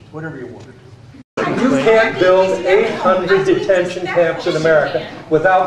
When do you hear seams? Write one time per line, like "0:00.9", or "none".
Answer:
0:01.3